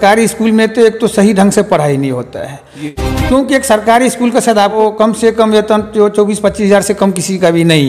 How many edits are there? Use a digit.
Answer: 2